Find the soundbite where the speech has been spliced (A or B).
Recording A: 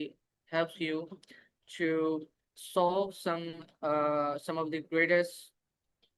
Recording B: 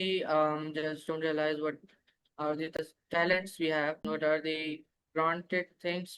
B